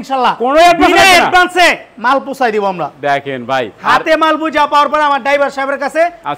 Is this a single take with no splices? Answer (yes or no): yes